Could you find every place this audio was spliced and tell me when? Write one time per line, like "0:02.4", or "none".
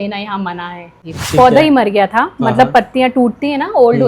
0:01.0